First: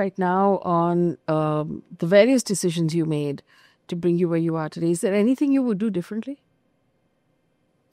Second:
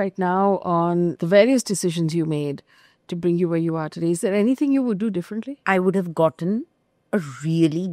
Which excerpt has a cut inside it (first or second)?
second